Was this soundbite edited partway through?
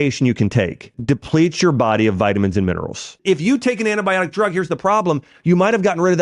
yes; 2 cuts; at 1.0 s, 3.2 s

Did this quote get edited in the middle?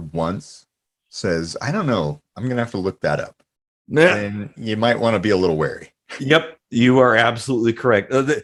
no; 0 cuts

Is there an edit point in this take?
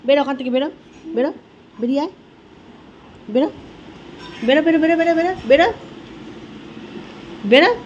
no; 0 cuts

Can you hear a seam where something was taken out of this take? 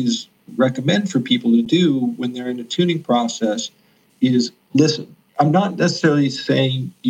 no; 0 cuts

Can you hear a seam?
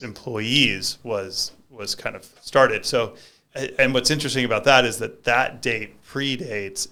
no; 0 cuts

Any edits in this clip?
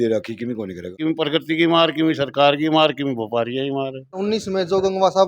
yes; 2 cuts; at 1.0 s, 4.2 s

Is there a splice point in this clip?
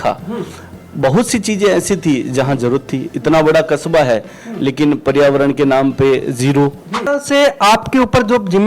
yes; 1 cut; at 7.0 s

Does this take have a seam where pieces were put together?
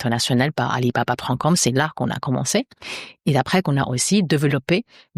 no; 0 cuts

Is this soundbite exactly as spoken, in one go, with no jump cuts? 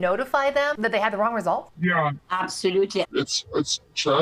no; 1 cut; at 3.1 s

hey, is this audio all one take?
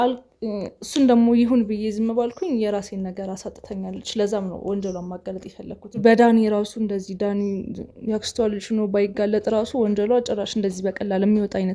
no; 1 cut; at 6.0 s

